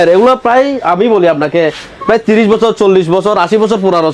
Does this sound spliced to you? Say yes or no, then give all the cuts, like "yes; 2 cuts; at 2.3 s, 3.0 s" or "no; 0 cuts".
no; 0 cuts